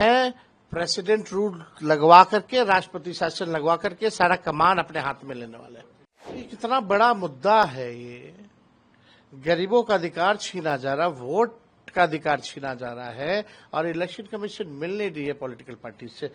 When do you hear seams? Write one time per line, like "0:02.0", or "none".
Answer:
0:06.4